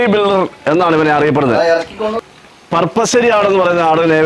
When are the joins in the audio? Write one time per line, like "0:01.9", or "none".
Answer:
0:02.2